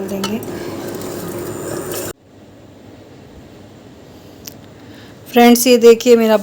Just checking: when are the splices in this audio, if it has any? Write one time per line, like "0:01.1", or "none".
0:02.1